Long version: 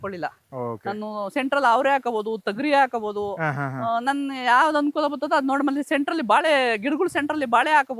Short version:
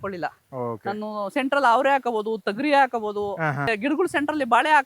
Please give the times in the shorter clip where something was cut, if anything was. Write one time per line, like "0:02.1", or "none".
0:03.7